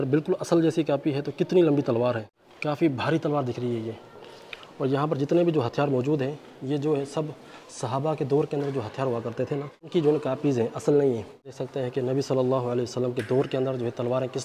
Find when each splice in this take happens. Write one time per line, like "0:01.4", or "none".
0:02.6
0:09.8
0:11.6